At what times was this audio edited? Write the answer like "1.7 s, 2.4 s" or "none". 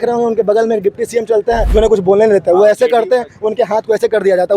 1.7 s